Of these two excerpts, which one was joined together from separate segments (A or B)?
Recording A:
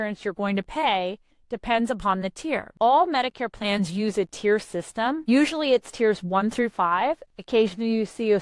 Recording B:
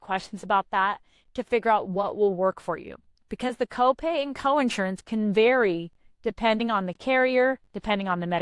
A